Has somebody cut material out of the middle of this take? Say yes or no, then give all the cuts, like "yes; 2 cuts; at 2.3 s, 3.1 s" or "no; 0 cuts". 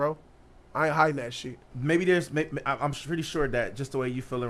no; 0 cuts